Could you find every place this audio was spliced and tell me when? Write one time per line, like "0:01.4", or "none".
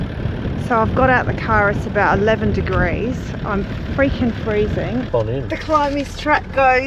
0:05.1